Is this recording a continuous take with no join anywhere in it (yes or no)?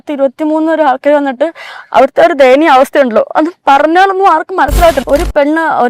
no